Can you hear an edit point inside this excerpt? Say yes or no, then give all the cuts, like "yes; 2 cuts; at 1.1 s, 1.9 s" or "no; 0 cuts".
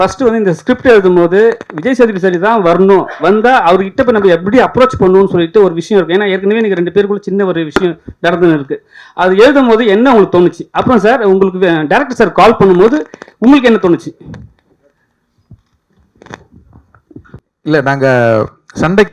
no; 0 cuts